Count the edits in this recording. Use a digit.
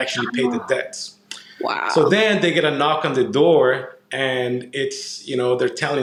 0